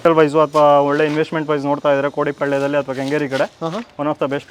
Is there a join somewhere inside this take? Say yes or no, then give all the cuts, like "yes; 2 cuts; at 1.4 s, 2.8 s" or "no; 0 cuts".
no; 0 cuts